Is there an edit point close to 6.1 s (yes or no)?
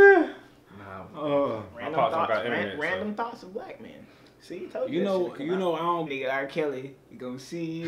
yes